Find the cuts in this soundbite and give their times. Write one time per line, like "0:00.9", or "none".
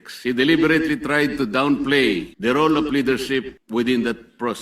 0:02.3
0:03.6